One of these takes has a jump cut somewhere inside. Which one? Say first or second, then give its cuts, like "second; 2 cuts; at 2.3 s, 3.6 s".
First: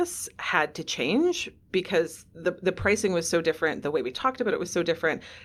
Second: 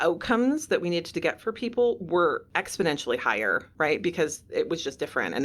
second; 2 cuts; at 2.5 s, 3.7 s